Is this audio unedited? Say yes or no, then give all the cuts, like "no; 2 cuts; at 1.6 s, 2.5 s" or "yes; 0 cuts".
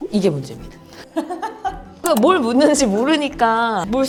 yes; 0 cuts